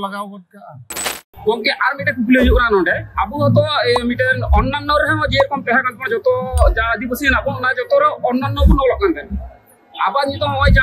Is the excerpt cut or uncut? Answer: cut